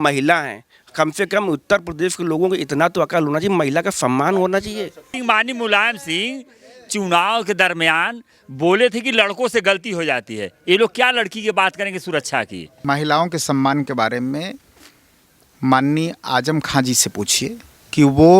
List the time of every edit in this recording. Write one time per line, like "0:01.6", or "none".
0:05.1
0:12.7